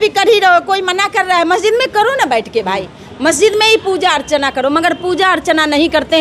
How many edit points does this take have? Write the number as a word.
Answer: zero